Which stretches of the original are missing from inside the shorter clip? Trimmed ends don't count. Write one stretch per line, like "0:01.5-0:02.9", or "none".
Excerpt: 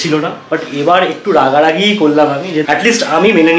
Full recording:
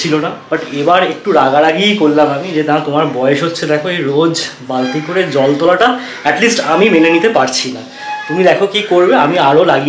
0:02.6-0:06.2